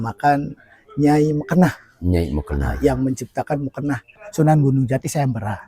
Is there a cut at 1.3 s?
no; 1 cut; at 4.1 s

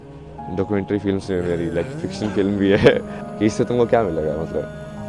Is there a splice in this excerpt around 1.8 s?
no; 1 cut; at 3.2 s

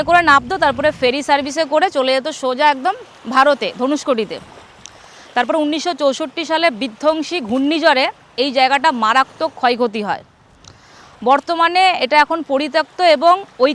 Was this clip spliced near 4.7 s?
no; 0 cuts

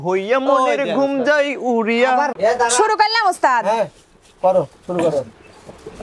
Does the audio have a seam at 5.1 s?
no; 1 cut; at 2.3 s

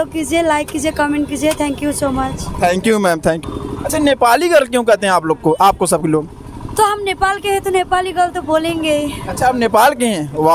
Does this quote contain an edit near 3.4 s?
yes; 1 cut; at 3.4 s

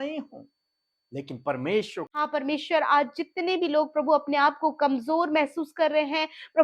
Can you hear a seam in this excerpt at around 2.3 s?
yes; 1 cut; at 2.3 s

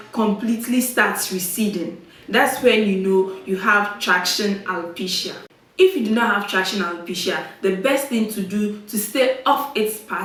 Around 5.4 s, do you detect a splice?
no; 0 cuts

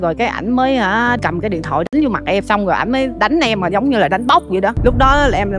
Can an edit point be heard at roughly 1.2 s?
yes; 3 cuts; at 1.2 s, 2.4 s, 4.8 s

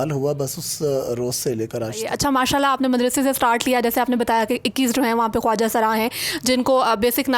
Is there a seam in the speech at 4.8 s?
no; 1 cut; at 2.1 s

